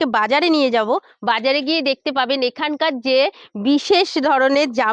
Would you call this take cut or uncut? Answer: uncut